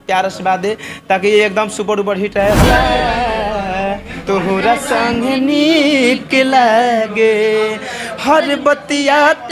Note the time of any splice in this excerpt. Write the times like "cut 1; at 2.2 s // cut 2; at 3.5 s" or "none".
cut 1; at 2.6 s